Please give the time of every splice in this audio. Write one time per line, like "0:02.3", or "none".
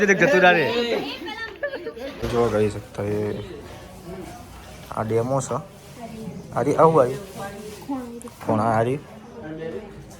0:02.2